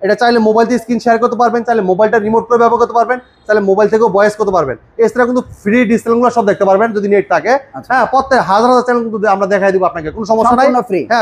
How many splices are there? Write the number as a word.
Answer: zero